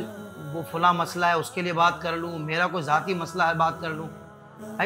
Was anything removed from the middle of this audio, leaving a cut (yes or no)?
no